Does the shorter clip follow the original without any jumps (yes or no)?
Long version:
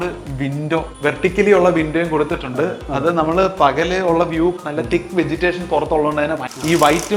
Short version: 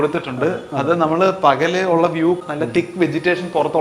yes